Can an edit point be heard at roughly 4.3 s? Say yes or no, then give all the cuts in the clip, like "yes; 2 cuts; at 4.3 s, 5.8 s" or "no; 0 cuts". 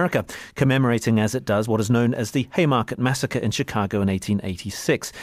no; 0 cuts